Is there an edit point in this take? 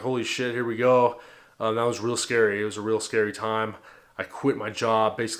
no; 0 cuts

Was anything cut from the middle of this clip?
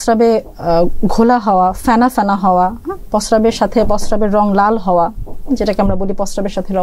no; 0 cuts

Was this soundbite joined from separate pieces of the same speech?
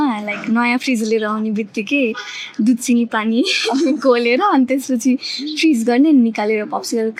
no; 0 cuts

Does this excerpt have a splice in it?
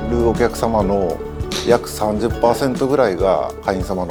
no; 0 cuts

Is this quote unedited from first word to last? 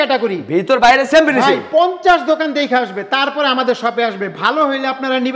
yes; 0 cuts

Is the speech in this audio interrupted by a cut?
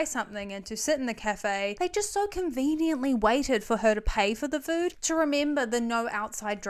yes; 1 cut; at 5.0 s

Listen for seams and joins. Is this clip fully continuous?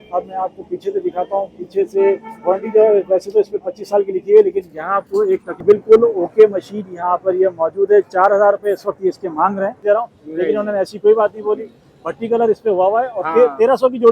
no; 2 cuts; at 5.6 s, 9.8 s

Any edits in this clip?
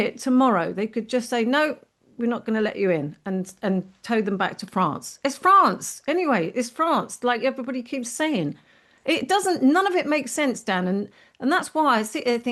no; 0 cuts

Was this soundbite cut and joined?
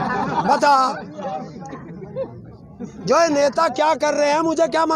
no; 0 cuts

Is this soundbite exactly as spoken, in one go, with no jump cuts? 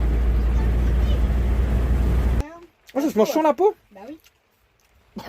no; 1 cut; at 2.4 s

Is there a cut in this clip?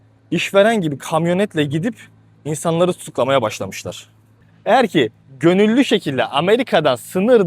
yes; 1 cut; at 4.5 s

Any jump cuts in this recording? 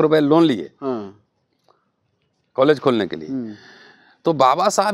no; 0 cuts

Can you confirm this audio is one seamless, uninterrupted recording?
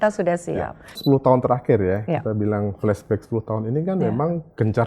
no; 1 cut; at 1.0 s

